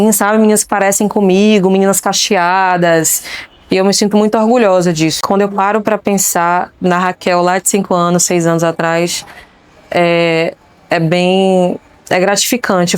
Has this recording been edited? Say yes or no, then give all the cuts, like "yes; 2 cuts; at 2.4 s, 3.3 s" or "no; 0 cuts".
yes; 1 cut; at 5.2 s